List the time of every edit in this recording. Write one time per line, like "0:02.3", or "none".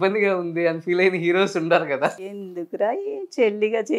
0:02.2